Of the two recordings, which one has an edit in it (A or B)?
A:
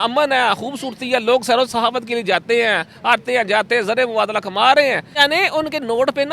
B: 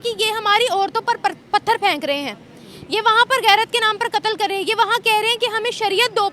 A